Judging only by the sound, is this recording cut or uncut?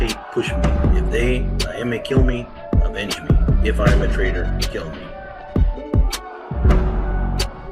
cut